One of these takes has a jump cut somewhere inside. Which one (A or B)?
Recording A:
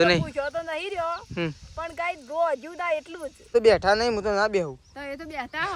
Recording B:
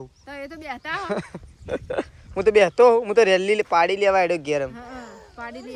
A